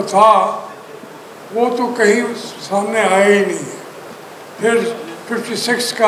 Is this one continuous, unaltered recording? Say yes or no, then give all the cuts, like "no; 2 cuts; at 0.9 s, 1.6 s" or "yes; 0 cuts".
yes; 0 cuts